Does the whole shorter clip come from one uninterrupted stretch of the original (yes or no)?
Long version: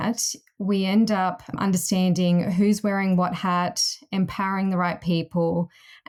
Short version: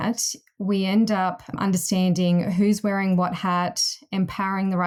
yes